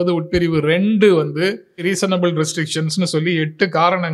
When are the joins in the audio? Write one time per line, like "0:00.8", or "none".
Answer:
0:01.8